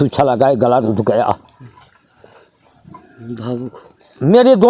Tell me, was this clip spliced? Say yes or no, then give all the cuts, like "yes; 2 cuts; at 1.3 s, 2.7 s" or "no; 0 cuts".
no; 0 cuts